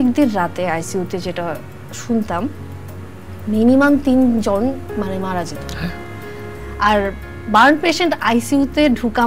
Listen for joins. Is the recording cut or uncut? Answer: uncut